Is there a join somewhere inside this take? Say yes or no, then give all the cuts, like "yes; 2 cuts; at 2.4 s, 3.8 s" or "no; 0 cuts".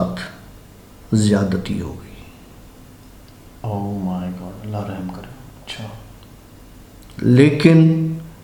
no; 0 cuts